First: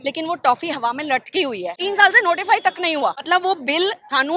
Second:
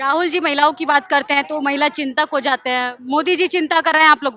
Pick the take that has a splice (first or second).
first